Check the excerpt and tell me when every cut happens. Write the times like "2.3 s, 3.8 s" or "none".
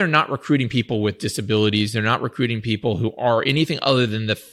none